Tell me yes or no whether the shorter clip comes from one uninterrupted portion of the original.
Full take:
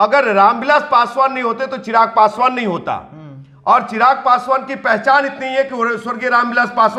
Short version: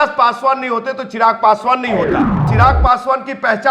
no